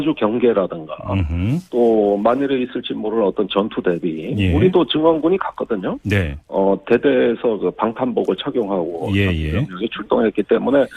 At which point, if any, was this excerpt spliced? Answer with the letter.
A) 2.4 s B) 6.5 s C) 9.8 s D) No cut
C